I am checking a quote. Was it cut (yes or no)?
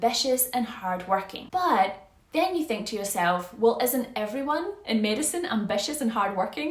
yes